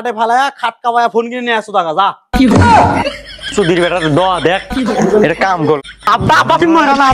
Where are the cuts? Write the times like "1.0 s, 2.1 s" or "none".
5.8 s